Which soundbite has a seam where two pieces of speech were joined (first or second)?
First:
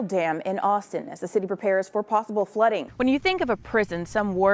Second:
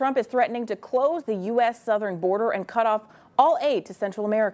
first